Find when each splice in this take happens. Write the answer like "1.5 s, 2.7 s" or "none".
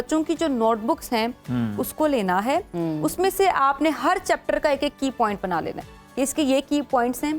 none

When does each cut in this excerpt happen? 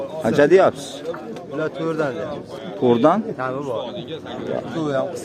none

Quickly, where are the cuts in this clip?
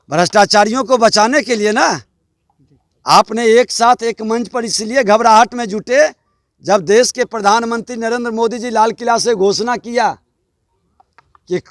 none

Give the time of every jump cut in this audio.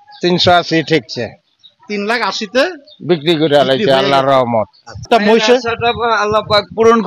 5.0 s

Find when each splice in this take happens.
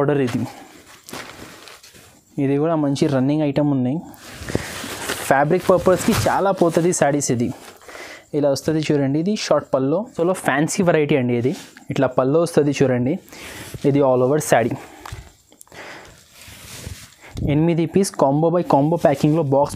10.2 s

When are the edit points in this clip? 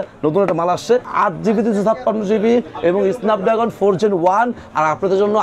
1.1 s

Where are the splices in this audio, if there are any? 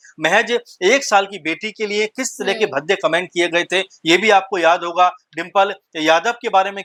none

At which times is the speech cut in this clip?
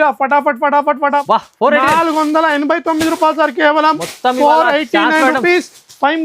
1.2 s

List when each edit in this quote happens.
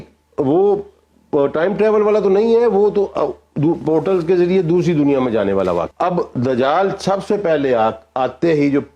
5.9 s

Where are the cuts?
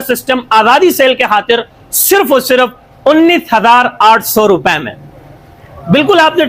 none

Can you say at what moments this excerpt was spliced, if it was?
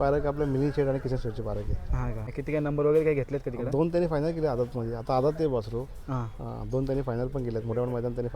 2.4 s

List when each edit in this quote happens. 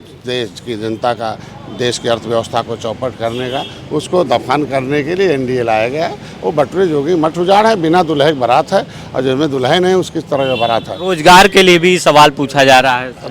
11.0 s

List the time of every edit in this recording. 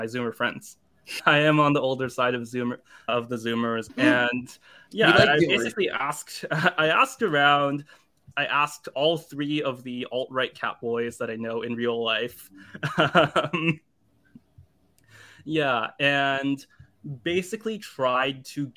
3.9 s, 8.2 s

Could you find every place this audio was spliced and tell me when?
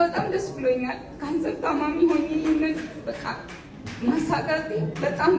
none

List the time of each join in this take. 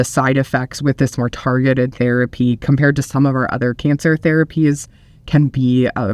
none

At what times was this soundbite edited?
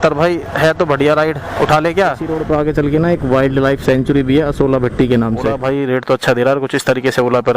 2.3 s, 5.5 s

